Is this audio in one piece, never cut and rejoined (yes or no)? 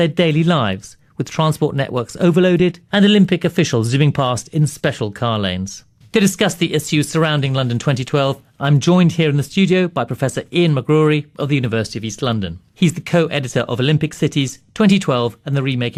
yes